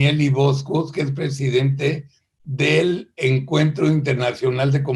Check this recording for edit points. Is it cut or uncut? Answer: uncut